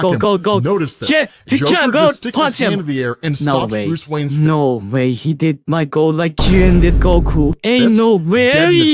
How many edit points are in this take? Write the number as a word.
zero